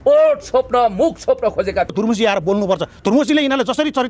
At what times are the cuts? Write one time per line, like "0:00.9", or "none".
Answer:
0:01.9